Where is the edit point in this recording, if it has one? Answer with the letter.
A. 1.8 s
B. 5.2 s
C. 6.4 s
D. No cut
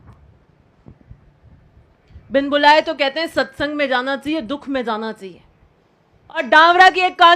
C